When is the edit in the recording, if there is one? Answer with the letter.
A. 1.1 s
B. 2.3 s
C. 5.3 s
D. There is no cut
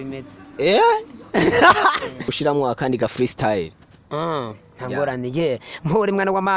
B